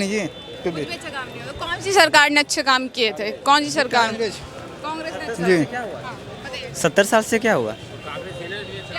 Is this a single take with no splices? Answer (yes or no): yes